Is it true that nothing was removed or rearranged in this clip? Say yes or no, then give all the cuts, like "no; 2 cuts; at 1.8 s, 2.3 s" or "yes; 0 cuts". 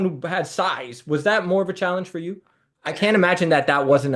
no; 1 cut; at 2.8 s